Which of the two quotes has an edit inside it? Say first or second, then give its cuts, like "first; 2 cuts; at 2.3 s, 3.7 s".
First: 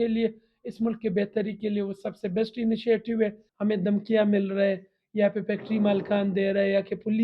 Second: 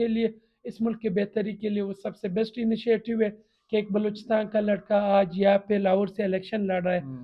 first; 1 cut; at 3.5 s